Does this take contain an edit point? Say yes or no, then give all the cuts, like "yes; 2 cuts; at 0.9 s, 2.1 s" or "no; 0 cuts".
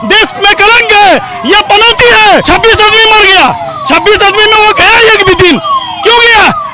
yes; 1 cut; at 2.4 s